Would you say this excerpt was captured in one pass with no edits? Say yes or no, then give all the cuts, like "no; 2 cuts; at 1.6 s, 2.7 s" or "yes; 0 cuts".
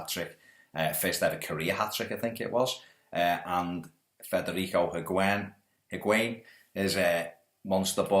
no; 1 cut; at 3.9 s